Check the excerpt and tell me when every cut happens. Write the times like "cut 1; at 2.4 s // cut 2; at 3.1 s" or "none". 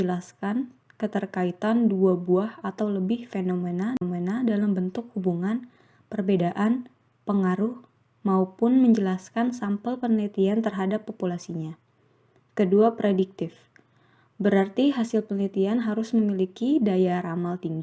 none

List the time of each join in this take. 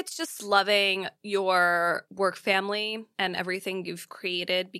cut 1; at 1.1 s // cut 2; at 2.1 s // cut 3; at 3.1 s

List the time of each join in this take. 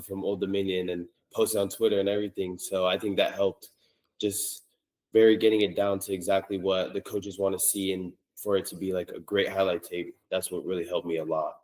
none

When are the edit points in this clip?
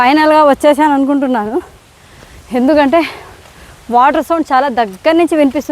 none

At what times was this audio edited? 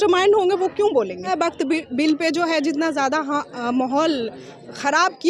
cut 1; at 1.3 s

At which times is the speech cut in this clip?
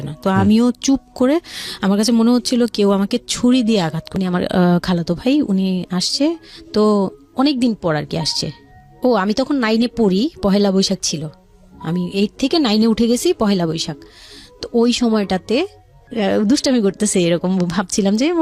cut 1; at 4.0 s // cut 2; at 16.0 s

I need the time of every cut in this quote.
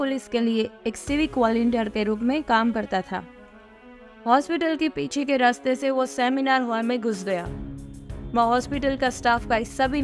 none

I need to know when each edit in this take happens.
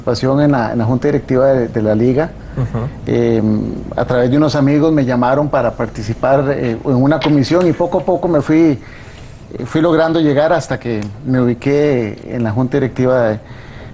cut 1; at 6.0 s

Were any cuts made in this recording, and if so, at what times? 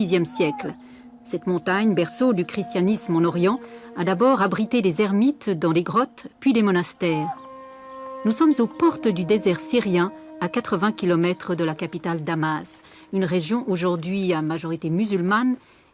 cut 1; at 10.3 s

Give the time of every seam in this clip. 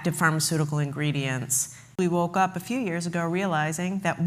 cut 1; at 1.9 s

